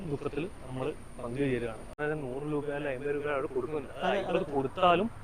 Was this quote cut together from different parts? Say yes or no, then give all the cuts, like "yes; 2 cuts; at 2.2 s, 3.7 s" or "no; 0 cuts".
yes; 1 cut; at 1.9 s